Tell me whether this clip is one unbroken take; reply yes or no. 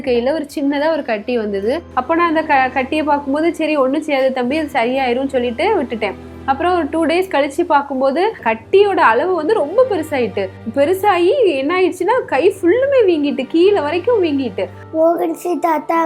no